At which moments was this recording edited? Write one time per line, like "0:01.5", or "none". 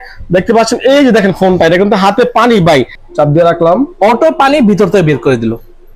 0:02.9